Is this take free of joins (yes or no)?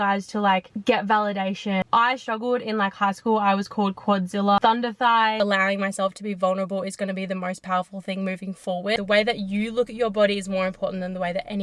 no